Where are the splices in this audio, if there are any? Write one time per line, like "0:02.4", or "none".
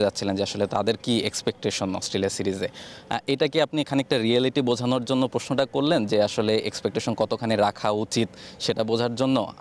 none